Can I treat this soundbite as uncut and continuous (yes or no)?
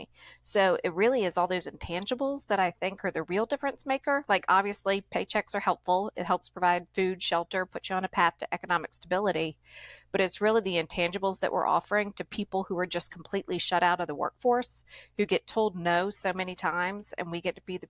yes